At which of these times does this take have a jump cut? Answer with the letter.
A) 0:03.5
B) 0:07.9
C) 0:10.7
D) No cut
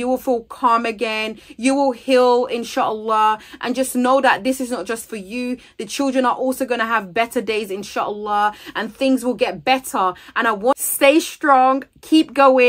C